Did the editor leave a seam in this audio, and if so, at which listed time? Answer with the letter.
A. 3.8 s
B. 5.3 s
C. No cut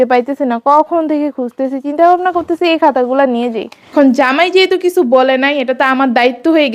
A